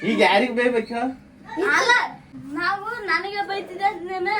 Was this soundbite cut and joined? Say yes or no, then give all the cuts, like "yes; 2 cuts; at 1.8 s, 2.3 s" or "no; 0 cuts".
yes; 1 cut; at 2.3 s